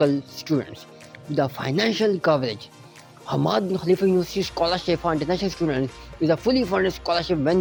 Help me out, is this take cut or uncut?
uncut